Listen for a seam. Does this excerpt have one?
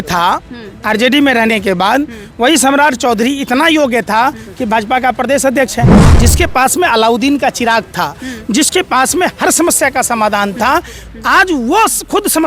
yes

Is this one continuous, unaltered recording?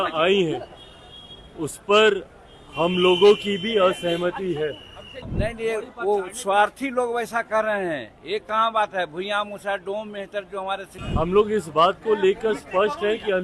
no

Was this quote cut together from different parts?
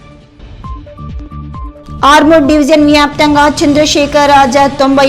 no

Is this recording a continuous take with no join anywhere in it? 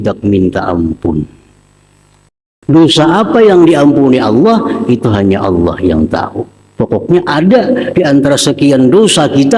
no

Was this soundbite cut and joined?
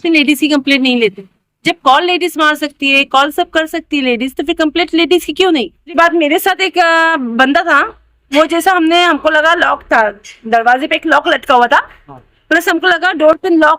yes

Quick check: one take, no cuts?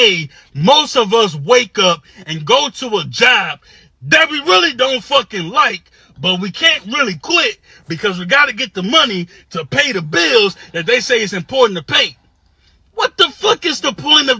yes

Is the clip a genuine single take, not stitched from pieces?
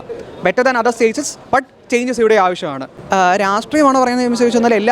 yes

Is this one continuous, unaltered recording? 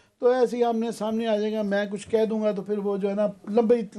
yes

